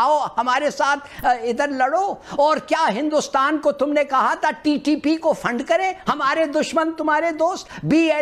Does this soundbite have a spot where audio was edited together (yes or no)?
no